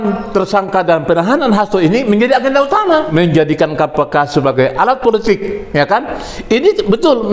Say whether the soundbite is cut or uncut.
cut